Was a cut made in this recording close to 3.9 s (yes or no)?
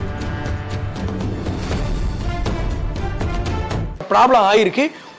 yes